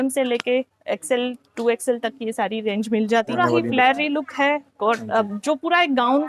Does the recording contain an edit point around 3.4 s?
yes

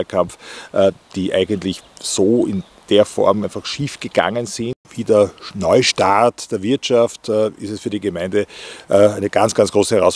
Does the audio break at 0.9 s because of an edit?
no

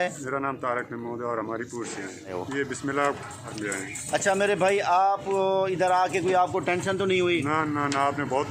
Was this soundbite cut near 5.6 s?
no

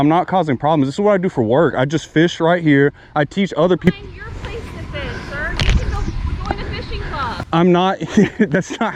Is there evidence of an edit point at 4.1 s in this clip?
no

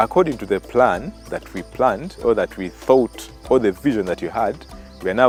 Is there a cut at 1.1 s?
no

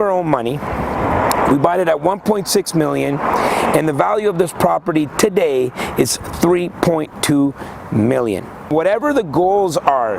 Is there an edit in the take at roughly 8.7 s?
yes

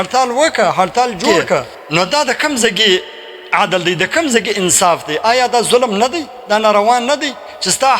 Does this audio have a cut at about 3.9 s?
no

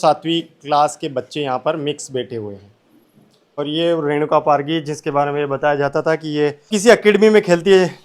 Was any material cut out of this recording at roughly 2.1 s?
no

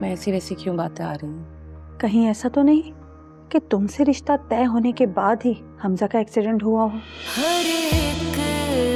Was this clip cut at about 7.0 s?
no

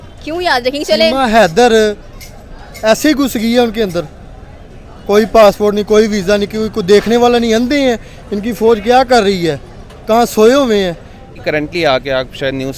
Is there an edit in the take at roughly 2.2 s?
no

